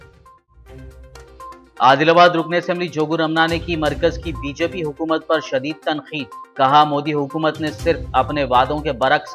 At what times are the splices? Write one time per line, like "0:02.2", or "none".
0:01.1